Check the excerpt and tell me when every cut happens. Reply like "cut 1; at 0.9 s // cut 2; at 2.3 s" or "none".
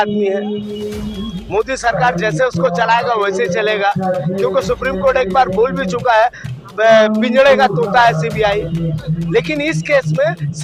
none